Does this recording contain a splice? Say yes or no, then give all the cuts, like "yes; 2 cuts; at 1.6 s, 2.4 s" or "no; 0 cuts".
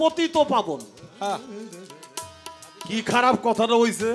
no; 0 cuts